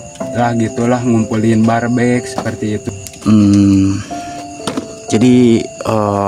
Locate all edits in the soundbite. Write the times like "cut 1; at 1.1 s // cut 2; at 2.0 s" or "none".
cut 1; at 2.8 s